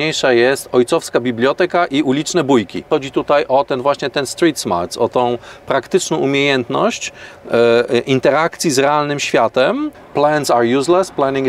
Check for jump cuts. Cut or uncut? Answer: cut